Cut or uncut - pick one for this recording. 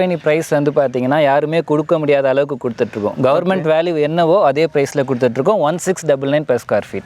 uncut